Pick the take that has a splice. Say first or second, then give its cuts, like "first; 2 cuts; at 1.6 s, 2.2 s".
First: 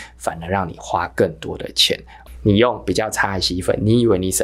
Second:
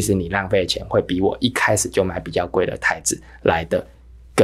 first; 1 cut; at 2.1 s